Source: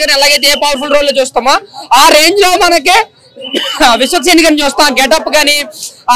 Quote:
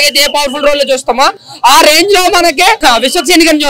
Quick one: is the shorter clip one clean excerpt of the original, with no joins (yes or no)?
no